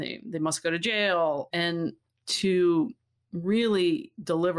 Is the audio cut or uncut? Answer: cut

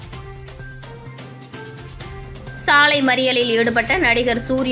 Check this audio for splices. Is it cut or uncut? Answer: uncut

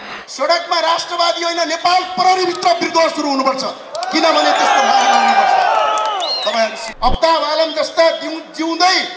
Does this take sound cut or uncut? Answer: cut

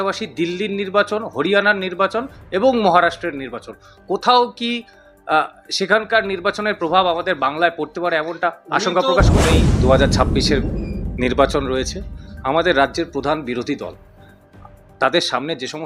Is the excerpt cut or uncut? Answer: cut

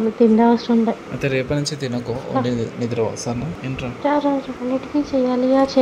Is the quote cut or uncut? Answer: uncut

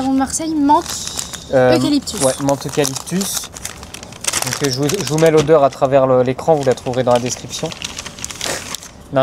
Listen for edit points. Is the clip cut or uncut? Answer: uncut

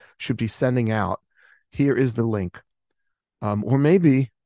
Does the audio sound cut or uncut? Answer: uncut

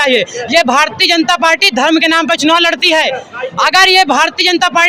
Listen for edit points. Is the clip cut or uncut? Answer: uncut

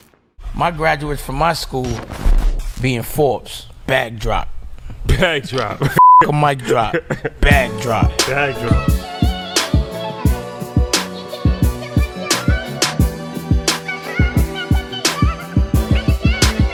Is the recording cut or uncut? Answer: uncut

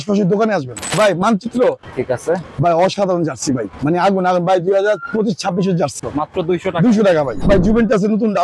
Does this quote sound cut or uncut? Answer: cut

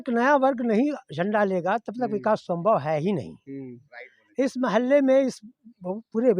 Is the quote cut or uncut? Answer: uncut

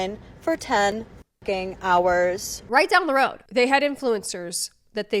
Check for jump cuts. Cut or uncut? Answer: cut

